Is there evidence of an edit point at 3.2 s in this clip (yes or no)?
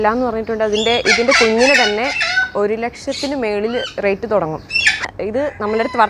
no